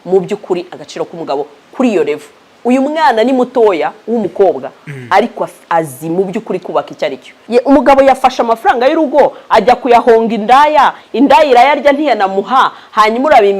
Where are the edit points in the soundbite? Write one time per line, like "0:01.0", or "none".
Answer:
0:07.4